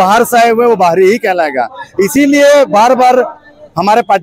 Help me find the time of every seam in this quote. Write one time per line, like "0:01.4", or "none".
none